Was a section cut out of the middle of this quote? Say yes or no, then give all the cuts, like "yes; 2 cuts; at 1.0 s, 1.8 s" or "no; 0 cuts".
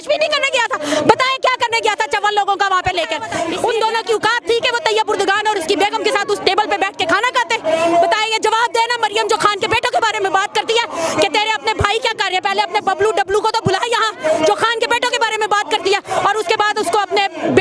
yes; 1 cut; at 3.4 s